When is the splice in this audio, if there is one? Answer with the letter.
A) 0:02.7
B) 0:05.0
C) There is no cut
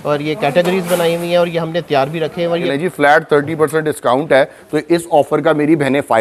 A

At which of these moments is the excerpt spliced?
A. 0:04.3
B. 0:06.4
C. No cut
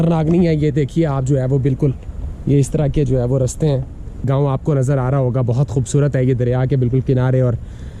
A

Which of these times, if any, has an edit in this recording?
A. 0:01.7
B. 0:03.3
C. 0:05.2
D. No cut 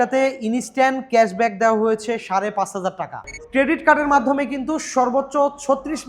B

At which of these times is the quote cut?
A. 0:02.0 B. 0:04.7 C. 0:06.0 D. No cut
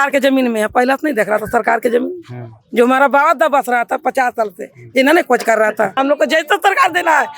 C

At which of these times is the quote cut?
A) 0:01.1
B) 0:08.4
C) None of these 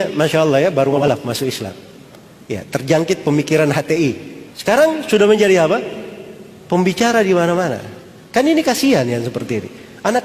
A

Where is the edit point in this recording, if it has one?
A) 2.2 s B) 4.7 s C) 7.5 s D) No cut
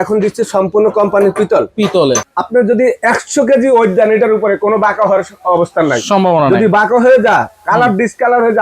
A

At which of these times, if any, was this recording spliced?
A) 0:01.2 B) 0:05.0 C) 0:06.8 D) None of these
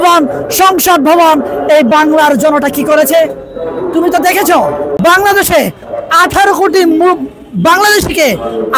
B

